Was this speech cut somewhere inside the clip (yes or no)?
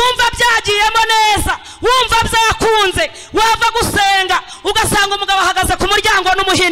no